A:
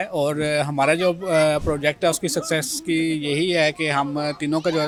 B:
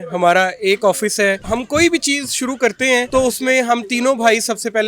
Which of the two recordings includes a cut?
B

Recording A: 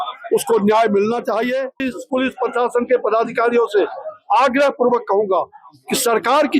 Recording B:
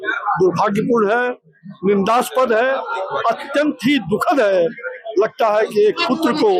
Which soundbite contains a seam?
A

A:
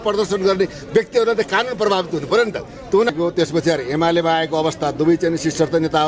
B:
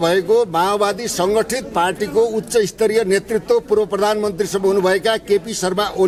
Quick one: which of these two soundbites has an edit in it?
A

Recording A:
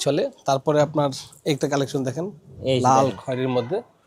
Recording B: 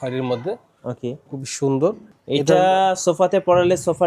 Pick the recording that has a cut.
B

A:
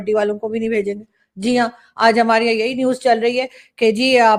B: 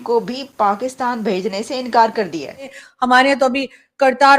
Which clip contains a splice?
B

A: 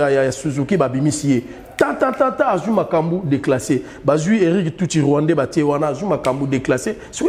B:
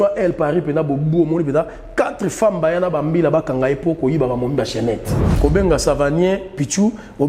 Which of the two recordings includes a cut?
B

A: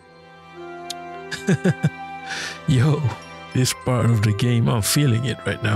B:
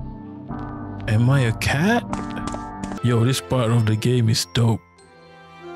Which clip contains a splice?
B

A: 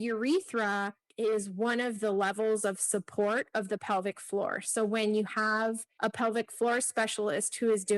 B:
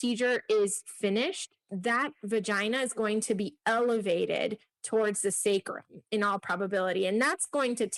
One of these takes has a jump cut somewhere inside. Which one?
A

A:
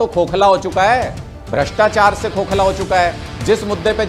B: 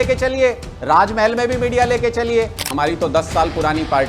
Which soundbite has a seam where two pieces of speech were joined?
B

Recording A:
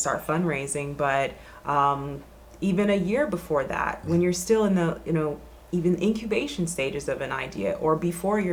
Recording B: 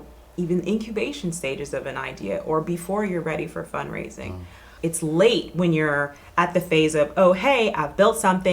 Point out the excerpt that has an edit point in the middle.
B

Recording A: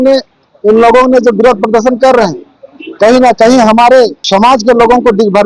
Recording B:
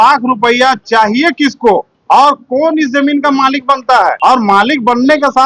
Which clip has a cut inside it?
A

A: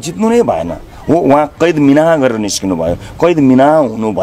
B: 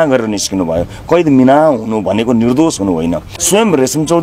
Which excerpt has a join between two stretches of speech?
B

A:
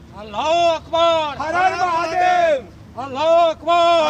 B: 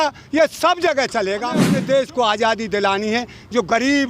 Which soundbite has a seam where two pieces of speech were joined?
B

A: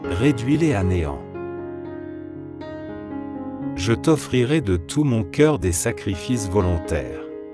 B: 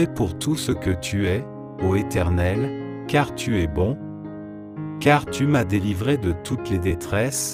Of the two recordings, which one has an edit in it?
A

